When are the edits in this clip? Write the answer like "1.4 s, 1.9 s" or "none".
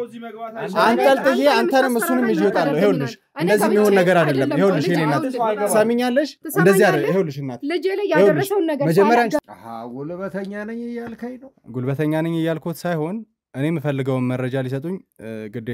9.4 s

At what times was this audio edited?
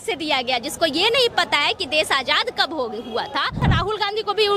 3.7 s

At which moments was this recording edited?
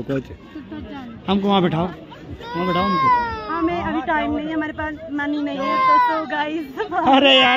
none

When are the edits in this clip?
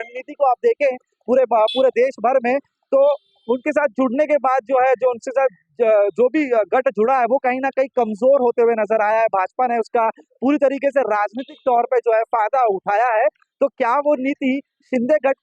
none

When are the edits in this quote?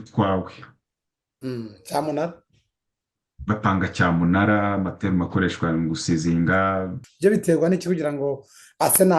7.1 s

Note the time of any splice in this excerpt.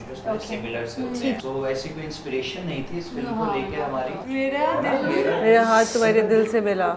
1.4 s, 4.2 s

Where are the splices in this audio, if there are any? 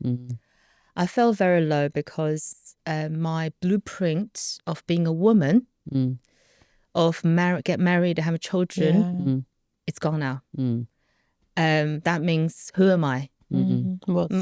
none

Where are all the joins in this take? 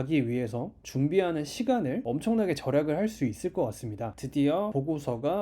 2.0 s

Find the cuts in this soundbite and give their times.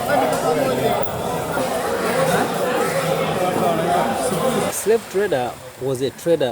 1.6 s, 4.7 s

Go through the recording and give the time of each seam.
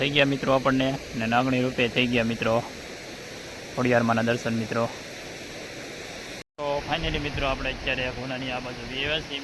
6.5 s

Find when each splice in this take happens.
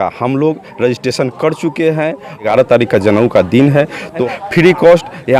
2.5 s, 4.2 s

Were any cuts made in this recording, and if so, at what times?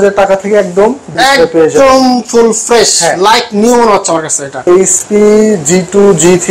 1.1 s, 4.7 s

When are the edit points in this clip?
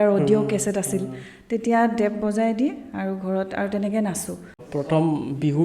4.6 s

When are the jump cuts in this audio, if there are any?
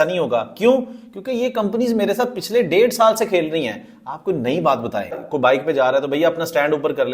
5.2 s

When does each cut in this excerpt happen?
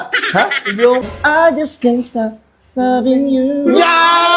1.1 s

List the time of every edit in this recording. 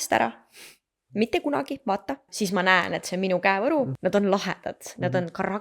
2.3 s, 3.9 s

